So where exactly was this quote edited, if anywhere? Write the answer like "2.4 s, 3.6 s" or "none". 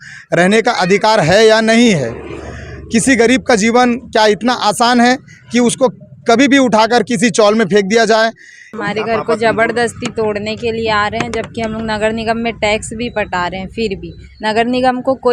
8.6 s